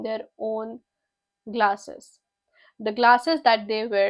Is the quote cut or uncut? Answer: uncut